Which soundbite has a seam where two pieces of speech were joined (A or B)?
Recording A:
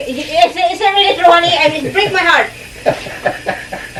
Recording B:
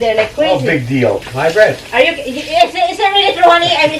B